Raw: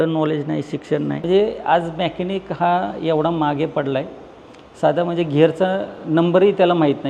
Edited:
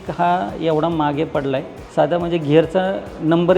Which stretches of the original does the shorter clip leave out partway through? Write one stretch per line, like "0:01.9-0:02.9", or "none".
0:04.2-0:04.6